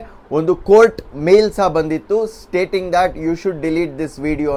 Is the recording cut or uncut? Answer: uncut